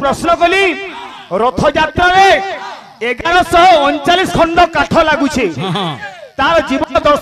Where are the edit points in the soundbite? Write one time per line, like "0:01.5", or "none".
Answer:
none